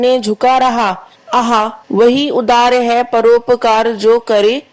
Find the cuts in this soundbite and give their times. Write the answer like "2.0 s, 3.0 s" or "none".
1.6 s